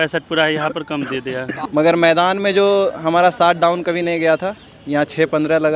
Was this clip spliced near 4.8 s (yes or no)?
no